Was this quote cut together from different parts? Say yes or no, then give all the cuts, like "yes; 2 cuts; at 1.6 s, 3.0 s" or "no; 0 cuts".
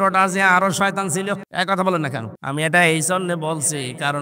yes; 2 cuts; at 1.5 s, 2.3 s